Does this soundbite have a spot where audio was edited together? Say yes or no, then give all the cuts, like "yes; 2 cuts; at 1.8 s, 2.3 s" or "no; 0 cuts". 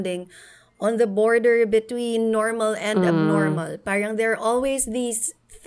no; 0 cuts